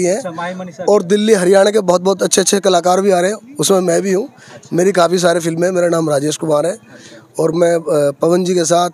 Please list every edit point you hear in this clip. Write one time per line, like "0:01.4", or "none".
none

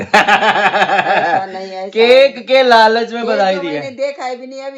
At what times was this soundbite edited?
none

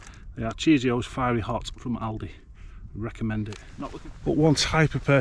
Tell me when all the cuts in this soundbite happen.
0:03.6

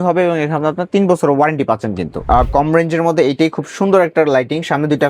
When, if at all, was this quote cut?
0:02.2

